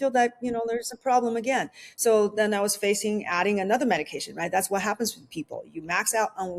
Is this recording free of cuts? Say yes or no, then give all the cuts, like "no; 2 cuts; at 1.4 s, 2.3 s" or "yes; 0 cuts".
yes; 0 cuts